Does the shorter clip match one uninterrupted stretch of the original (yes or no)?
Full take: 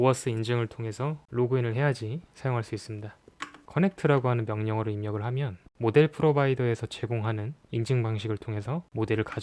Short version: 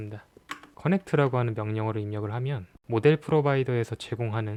yes